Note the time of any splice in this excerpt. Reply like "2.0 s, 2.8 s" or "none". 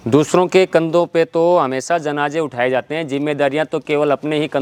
none